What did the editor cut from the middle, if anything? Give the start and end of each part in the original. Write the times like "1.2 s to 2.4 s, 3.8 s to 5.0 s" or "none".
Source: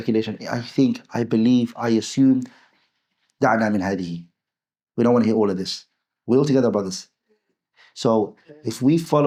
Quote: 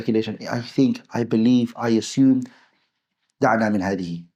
none